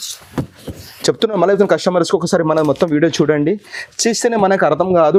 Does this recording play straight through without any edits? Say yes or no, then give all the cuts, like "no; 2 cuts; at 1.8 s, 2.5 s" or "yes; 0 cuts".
yes; 0 cuts